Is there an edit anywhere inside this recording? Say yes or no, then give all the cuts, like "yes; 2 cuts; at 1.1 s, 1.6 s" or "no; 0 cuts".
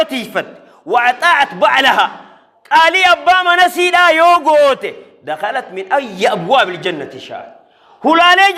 no; 0 cuts